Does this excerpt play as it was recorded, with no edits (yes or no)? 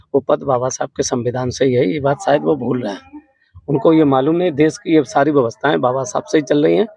yes